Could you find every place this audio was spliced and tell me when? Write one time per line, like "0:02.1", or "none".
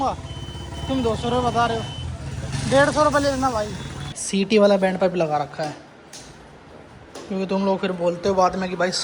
0:02.5
0:04.2